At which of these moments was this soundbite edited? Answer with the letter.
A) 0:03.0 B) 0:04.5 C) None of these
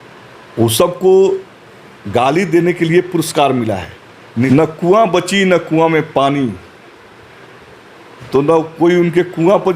B